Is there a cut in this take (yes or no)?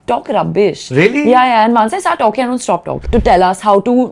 yes